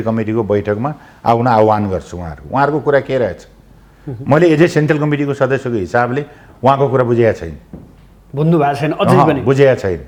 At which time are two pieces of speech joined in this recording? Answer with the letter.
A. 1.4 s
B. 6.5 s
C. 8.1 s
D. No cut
D